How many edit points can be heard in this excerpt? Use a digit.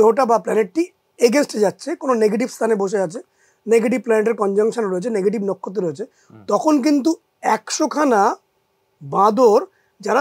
0